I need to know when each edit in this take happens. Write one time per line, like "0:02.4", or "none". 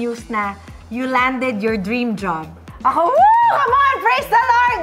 none

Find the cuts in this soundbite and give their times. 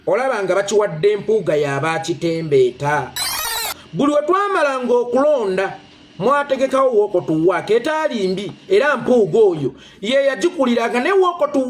0:03.5

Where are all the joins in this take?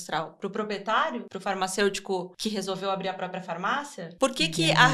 0:01.3
0:02.3
0:04.0

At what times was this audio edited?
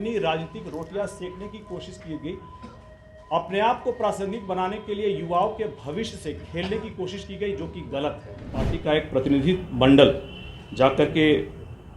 0:08.7

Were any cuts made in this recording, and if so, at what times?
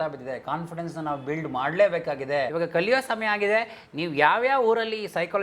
0:02.5

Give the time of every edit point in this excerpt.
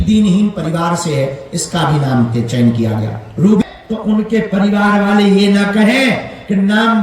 0:03.6

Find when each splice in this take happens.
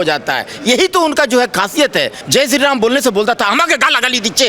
0:02.2

